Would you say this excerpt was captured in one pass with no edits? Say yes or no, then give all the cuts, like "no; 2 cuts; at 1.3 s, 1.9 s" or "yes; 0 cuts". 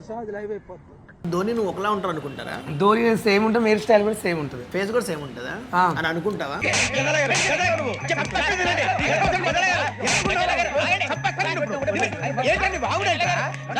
no; 1 cut; at 1.2 s